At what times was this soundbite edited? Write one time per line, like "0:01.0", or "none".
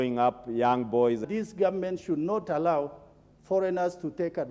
0:01.2